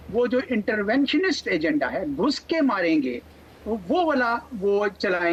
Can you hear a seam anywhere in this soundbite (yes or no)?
no